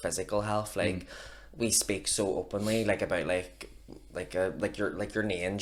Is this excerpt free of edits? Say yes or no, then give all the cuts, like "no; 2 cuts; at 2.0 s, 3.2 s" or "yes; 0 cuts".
yes; 0 cuts